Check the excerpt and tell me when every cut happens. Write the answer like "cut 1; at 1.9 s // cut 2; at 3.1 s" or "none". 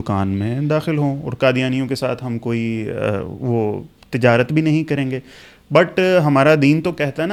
none